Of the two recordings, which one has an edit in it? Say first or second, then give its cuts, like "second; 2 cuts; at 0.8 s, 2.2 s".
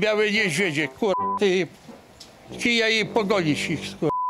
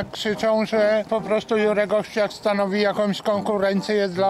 second; 1 cut; at 1.1 s